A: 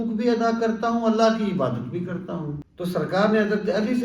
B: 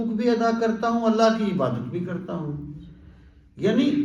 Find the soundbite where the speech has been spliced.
A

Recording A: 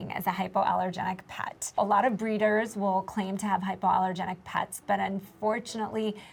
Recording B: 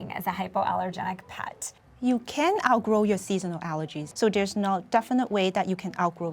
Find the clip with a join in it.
B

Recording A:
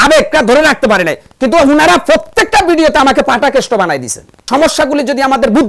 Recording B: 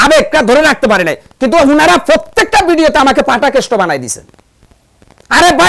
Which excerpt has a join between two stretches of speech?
A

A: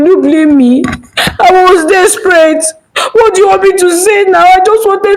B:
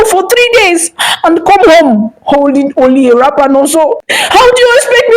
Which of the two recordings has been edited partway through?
B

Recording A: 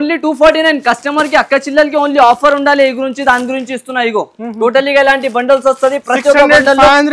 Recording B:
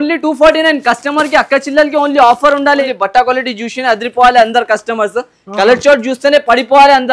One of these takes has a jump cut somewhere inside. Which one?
B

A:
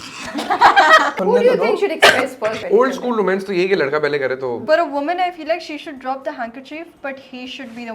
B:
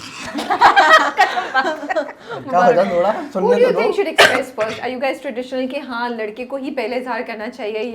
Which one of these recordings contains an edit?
A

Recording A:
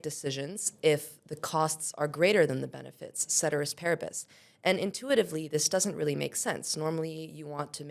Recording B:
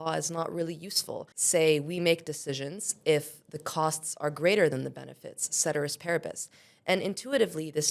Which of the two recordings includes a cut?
B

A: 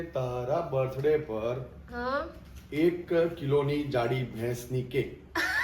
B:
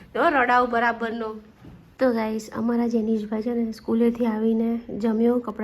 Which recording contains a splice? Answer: B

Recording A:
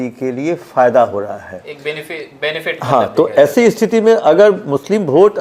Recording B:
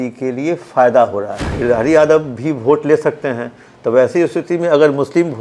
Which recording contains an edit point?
B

